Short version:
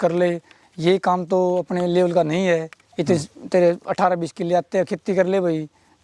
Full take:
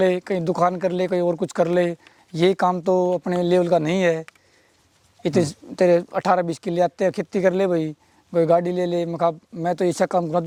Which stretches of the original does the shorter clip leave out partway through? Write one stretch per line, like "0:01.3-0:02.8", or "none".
0:04.3-0:05.1